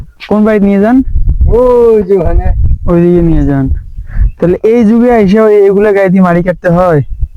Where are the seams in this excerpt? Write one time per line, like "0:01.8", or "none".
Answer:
none